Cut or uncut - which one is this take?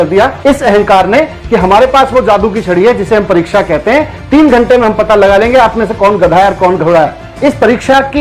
uncut